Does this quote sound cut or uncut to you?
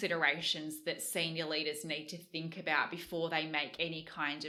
uncut